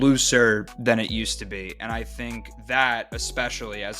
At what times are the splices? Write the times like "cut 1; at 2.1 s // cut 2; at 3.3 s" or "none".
cut 1; at 2.5 s